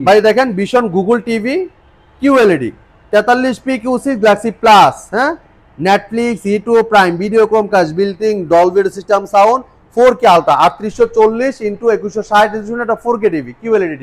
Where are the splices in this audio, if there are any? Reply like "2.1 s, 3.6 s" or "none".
none